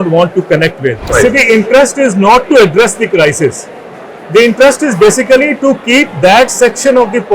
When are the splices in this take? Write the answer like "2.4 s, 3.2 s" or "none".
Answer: 1.1 s